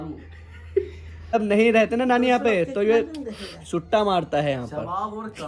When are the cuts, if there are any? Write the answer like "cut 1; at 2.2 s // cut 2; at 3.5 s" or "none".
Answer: cut 1; at 1.3 s